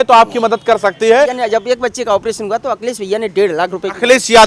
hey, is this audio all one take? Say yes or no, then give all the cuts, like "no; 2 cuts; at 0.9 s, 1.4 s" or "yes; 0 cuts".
no; 1 cut; at 1.4 s